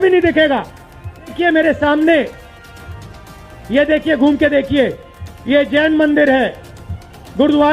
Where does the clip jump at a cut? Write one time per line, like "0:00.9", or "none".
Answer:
0:01.3